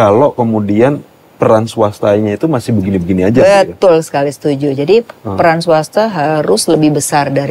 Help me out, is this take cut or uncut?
uncut